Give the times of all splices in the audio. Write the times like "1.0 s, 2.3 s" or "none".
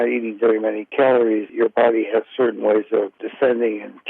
1.5 s, 3.2 s